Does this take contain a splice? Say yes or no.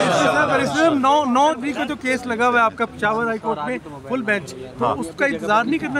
yes